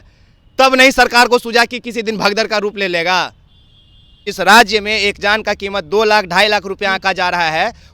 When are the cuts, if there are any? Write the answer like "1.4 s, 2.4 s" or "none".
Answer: 4.3 s